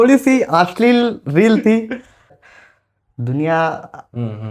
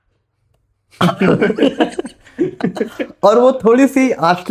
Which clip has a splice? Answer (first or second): first